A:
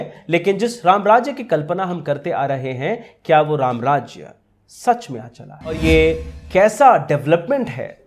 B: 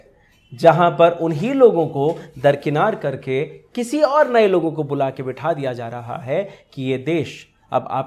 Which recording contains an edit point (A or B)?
A